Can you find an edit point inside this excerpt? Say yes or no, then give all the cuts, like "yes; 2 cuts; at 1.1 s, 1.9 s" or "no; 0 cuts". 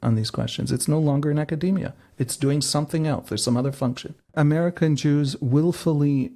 yes; 1 cut; at 4.3 s